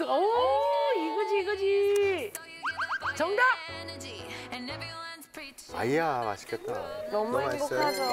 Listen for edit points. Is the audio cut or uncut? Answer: uncut